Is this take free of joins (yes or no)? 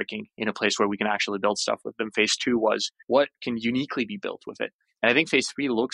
no